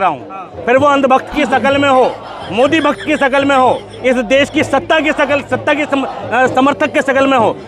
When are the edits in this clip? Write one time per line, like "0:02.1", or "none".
none